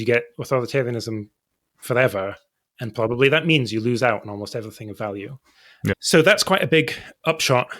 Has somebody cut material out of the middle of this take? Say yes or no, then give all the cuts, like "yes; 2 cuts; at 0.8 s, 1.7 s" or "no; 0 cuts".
no; 0 cuts